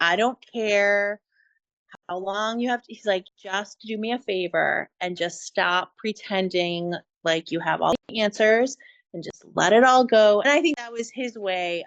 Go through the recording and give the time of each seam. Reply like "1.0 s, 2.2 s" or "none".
10.4 s